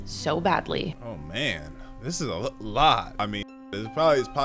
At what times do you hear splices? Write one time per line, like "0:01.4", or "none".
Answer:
0:01.0
0:03.2